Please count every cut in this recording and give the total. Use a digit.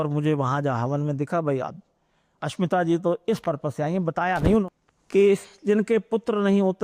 1